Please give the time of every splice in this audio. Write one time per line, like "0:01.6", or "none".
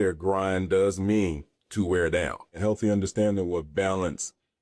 0:02.6

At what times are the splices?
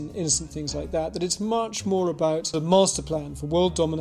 0:02.5

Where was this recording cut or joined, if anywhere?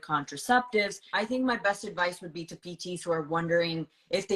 0:01.0

